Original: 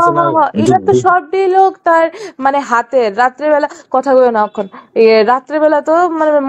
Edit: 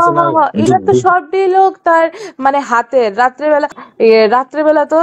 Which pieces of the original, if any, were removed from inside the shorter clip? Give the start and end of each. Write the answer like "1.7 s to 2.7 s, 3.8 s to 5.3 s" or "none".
3.8 s to 4.7 s